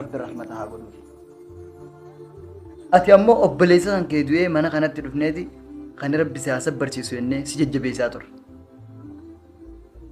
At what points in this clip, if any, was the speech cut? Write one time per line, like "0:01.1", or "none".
none